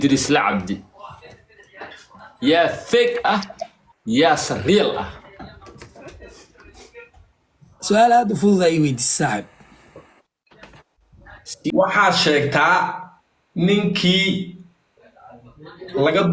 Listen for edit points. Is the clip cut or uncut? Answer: cut